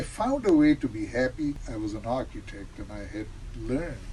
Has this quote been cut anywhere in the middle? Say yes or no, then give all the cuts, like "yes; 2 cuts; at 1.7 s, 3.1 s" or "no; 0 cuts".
yes; 1 cut; at 1.6 s